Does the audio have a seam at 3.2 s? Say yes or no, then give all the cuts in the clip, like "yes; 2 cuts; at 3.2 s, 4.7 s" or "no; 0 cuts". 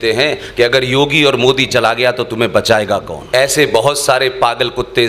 yes; 1 cut; at 3.2 s